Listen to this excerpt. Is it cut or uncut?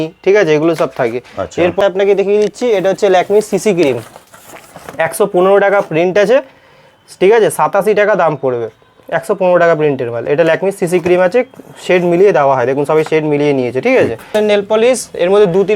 cut